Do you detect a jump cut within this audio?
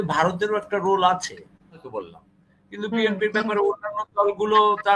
yes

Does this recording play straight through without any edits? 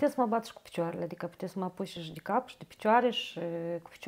yes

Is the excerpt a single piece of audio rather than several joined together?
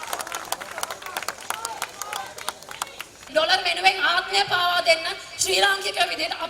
no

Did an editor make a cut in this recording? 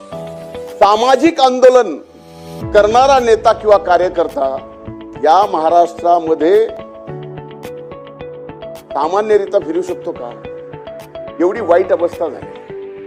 yes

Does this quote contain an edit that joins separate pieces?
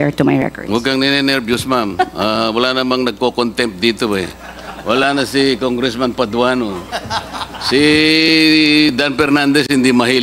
no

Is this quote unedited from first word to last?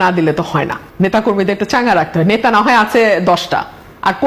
yes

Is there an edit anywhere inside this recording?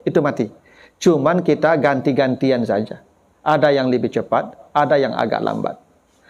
no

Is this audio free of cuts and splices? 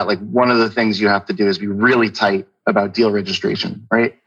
yes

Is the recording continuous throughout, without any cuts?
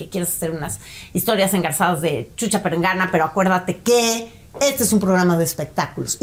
yes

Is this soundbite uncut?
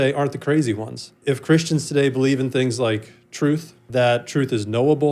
no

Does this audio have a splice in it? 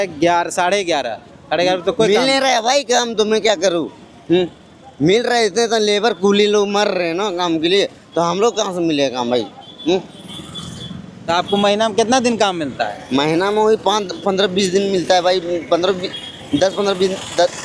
no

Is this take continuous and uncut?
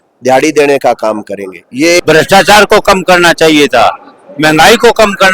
no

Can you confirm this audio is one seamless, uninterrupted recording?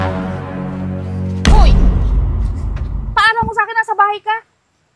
no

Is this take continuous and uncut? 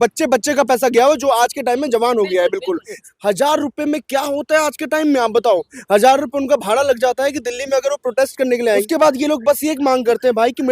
no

